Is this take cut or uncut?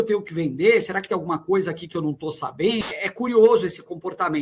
cut